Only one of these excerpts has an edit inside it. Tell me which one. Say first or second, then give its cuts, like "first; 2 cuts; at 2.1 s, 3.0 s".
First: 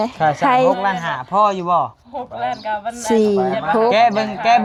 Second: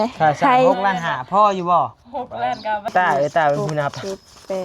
second; 1 cut; at 2.9 s